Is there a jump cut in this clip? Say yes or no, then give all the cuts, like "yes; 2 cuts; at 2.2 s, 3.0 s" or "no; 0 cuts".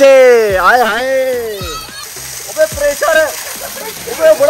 no; 0 cuts